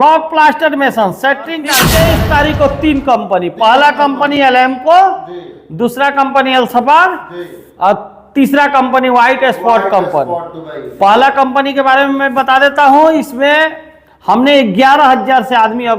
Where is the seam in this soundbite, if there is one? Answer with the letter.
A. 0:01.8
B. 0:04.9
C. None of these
A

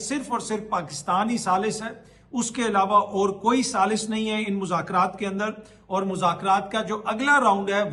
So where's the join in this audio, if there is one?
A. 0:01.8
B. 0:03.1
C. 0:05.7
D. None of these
D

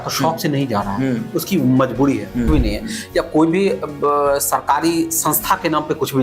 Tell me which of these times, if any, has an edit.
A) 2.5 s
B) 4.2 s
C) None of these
A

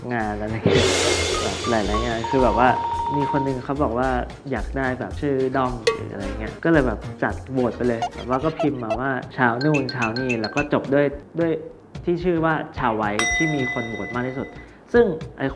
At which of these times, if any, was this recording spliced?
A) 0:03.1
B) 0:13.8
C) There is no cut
A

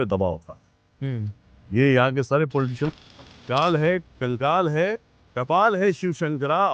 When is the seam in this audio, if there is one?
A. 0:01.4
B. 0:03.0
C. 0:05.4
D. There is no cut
B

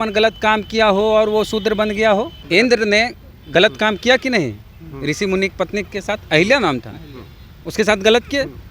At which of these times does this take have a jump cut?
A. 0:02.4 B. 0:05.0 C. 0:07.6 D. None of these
A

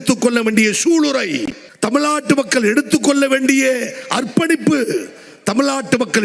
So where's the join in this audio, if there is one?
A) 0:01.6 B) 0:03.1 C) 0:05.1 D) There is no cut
A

